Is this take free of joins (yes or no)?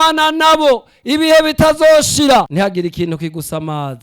no